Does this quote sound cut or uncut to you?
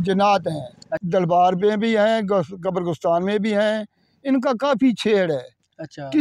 cut